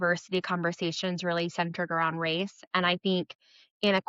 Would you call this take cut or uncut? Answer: uncut